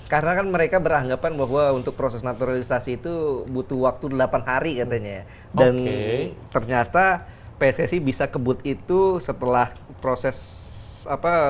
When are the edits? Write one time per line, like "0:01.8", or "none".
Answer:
none